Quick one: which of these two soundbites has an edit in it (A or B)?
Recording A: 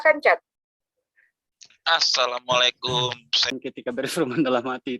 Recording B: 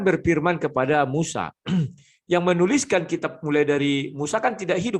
A